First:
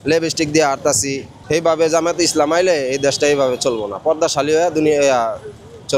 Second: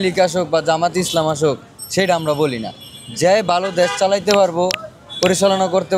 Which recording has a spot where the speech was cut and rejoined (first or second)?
first